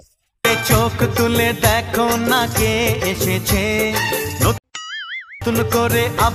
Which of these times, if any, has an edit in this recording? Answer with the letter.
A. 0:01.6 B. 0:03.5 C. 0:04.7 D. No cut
D